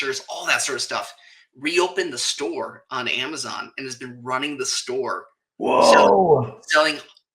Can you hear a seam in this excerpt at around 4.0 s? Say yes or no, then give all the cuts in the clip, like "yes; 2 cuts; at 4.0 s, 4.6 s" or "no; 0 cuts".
no; 0 cuts